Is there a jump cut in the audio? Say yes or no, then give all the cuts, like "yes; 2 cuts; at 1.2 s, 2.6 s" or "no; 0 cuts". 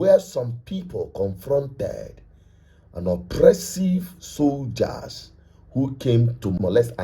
no; 0 cuts